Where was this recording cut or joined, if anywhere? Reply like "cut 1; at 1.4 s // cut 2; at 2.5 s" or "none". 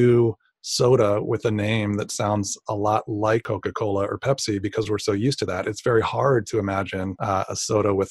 cut 1; at 3.5 s // cut 2; at 7.1 s